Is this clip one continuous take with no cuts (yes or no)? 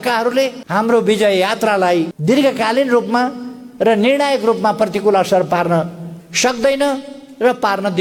yes